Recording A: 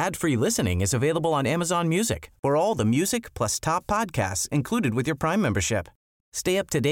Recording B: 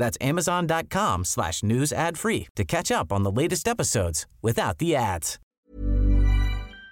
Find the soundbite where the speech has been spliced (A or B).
B